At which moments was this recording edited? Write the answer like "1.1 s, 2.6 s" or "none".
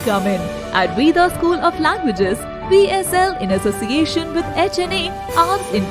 none